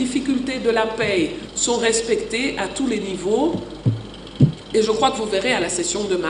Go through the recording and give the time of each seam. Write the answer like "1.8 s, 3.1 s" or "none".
1.5 s